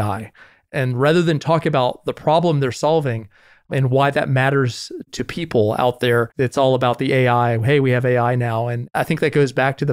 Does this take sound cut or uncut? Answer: cut